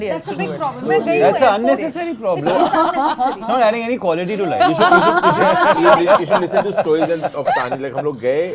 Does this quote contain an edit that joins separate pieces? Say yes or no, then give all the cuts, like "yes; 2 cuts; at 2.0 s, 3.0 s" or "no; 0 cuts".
no; 0 cuts